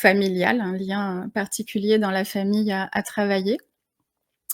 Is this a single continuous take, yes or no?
yes